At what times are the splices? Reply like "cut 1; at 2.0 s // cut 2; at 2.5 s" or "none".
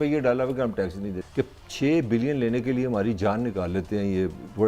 cut 1; at 1.2 s